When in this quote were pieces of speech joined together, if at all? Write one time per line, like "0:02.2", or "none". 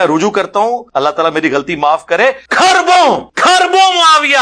0:00.8
0:02.4
0:03.3